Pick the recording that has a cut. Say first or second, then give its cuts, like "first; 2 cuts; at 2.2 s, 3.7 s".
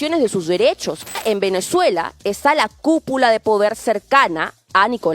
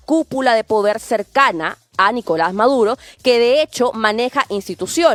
first; 1 cut; at 1.2 s